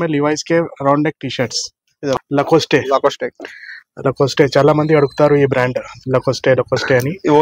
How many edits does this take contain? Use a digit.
1